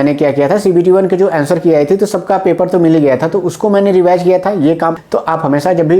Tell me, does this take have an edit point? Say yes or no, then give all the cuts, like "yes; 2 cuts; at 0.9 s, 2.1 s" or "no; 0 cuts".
yes; 1 cut; at 5.0 s